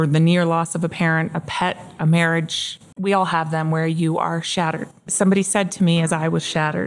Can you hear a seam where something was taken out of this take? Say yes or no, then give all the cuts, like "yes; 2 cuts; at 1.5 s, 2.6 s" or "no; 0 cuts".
no; 0 cuts